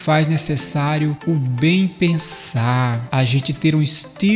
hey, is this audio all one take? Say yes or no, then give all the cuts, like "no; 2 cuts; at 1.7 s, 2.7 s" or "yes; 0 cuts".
no; 2 cuts; at 1.2 s, 3.0 s